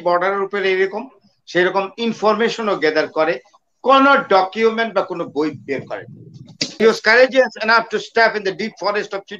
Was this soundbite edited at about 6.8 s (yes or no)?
yes